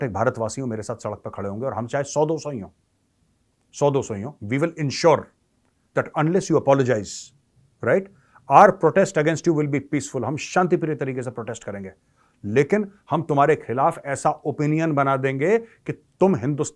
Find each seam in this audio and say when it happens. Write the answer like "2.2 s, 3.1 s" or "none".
none

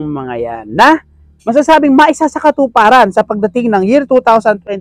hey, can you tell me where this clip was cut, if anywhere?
none

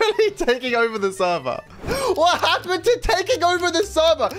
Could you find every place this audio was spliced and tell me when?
1.6 s

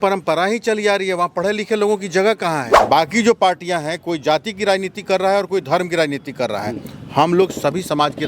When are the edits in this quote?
2.7 s

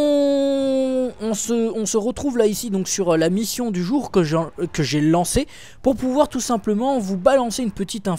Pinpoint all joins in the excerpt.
none

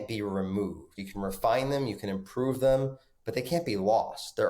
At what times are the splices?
0.9 s

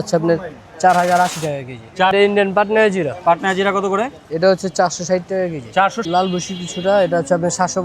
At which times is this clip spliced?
2.1 s, 6.0 s

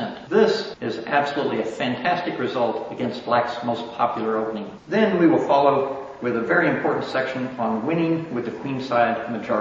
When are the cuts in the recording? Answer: 7.3 s

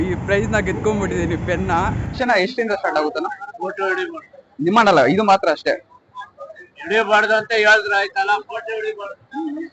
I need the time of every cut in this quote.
2.2 s

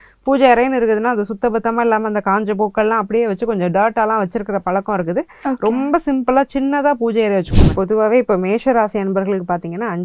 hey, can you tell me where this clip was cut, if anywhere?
7.6 s

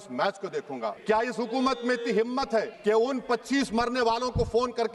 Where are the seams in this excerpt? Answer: none

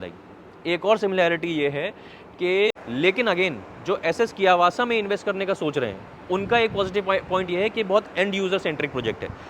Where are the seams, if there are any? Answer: 2.7 s

